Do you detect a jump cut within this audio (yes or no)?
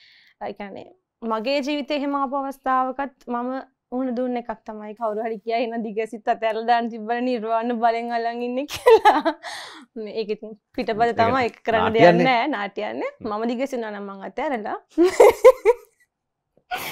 yes